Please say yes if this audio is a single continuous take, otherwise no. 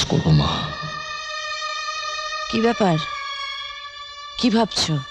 yes